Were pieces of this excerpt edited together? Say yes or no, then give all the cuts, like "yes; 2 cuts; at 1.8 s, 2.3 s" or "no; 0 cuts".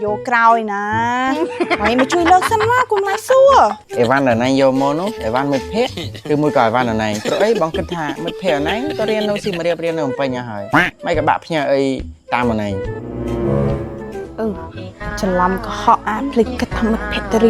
yes; 1 cut; at 3.8 s